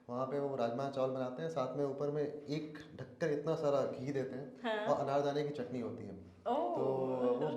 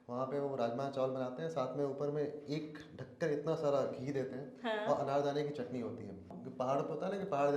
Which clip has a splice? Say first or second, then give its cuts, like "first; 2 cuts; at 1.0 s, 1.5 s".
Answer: second; 1 cut; at 6.3 s